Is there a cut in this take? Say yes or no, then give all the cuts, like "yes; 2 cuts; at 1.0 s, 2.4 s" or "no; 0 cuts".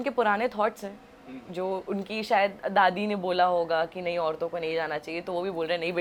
no; 0 cuts